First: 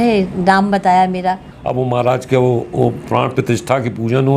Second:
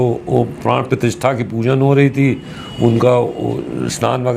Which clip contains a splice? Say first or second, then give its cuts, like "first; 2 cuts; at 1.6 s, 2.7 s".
first; 1 cut; at 1.5 s